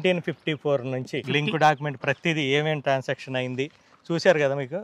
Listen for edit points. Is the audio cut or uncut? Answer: cut